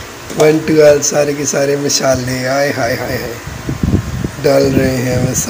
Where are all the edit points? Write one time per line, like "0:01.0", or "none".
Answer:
none